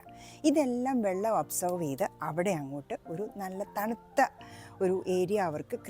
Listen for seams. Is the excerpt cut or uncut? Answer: uncut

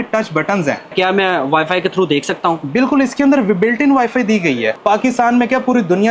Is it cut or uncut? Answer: cut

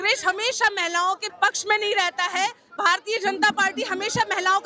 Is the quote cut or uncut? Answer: cut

